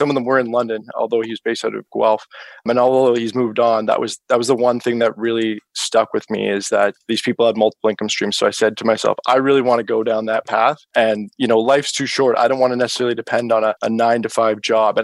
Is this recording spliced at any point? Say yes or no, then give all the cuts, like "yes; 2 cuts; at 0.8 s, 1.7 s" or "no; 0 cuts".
yes; 1 cut; at 1.8 s